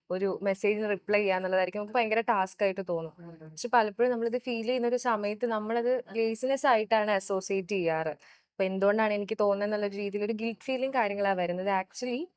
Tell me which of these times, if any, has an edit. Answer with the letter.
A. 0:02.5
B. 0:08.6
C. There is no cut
C